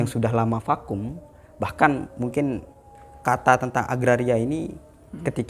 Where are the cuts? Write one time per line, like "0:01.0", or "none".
none

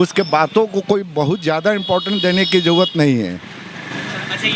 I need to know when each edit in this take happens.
none

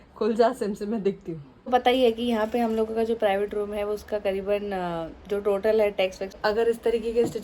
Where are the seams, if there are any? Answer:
0:01.7
0:06.4

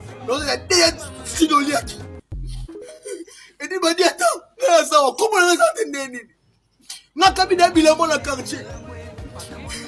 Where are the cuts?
0:08.6

